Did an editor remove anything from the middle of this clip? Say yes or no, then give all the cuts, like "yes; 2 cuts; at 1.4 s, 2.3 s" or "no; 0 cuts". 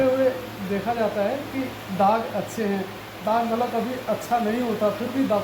no; 0 cuts